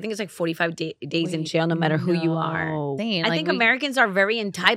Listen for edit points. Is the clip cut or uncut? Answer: cut